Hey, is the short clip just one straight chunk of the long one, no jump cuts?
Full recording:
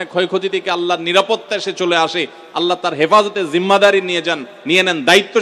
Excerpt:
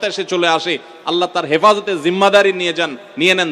yes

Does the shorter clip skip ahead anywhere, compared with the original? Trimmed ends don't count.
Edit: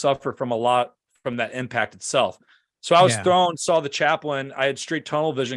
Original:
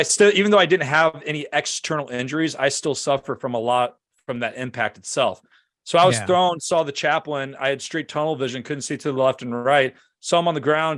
no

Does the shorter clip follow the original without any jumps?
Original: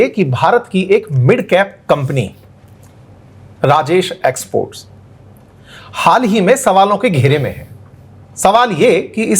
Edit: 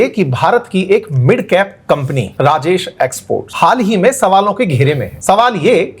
no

